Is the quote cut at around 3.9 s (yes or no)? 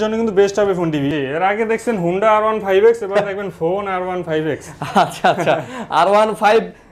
no